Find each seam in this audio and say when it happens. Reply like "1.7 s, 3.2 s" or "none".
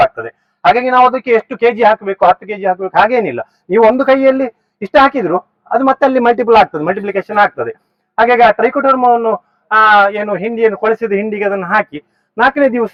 none